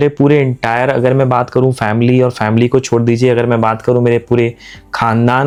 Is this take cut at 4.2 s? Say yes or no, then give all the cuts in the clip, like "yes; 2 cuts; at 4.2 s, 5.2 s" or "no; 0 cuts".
no; 0 cuts